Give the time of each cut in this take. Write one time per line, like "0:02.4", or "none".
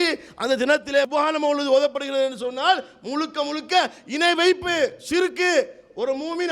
0:01.1

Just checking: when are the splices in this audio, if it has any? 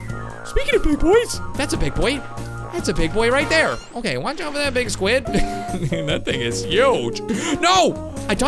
none

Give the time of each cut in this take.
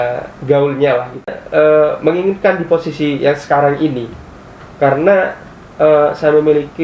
0:01.4

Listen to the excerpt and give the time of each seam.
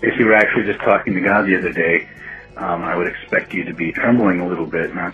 none

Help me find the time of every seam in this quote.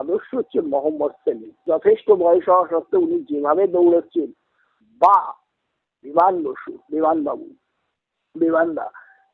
0:01.6

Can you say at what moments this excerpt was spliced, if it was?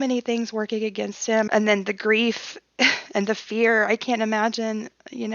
0:01.5

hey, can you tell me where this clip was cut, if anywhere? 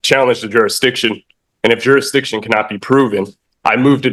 none

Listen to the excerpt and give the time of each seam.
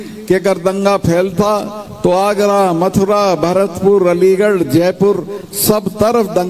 none

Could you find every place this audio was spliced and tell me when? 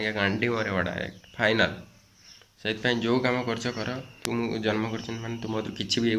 0:04.2

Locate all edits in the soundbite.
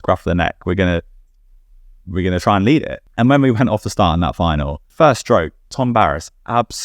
0:03.0
0:04.9

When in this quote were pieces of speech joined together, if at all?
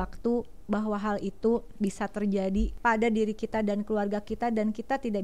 0:02.7

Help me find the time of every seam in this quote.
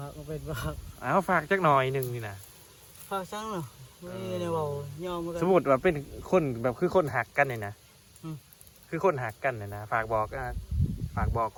none

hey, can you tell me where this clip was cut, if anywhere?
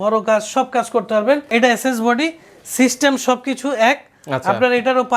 0:01.5

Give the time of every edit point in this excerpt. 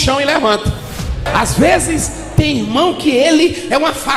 0:01.3

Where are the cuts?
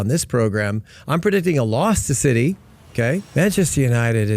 0:03.2

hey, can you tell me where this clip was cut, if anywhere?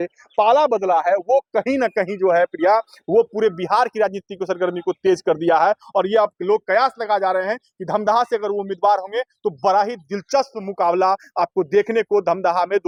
none

